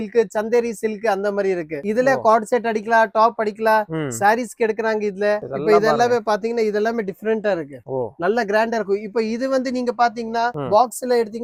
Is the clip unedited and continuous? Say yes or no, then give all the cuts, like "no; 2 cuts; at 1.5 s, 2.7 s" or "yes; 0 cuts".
yes; 0 cuts